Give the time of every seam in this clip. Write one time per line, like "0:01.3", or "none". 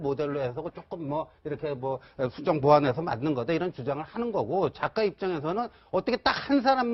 none